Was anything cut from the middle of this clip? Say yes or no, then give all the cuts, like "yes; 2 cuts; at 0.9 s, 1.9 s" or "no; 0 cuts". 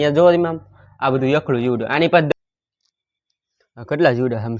yes; 1 cut; at 2.3 s